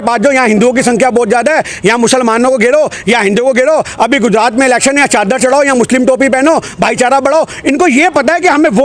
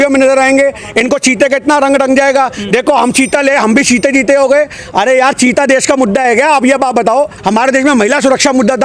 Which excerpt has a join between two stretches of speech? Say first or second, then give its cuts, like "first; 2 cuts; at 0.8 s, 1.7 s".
second; 1 cut; at 7.4 s